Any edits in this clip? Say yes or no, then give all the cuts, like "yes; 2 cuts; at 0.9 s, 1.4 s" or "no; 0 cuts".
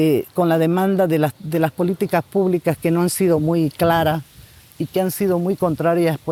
no; 0 cuts